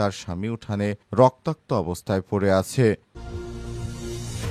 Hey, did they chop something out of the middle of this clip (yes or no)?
yes